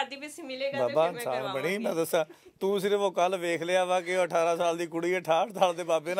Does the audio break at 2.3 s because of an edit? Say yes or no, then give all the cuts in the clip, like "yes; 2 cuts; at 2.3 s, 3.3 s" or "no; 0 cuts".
no; 0 cuts